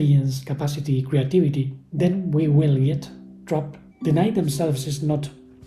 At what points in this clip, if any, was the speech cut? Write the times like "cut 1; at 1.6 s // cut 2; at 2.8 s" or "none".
cut 1; at 1.8 s // cut 2; at 3.8 s